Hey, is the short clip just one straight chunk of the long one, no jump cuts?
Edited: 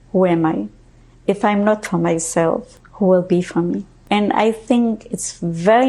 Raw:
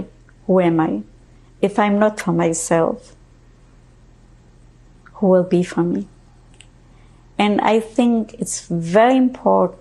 no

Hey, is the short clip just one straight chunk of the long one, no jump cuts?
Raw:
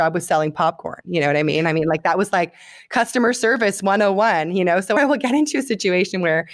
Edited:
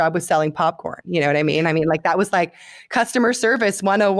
yes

